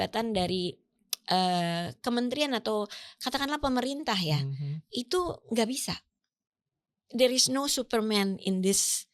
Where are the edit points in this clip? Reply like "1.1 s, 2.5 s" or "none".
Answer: none